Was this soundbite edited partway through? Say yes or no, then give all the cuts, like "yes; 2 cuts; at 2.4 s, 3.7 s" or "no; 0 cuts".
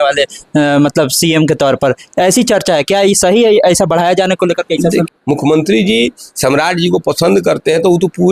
yes; 1 cut; at 5.1 s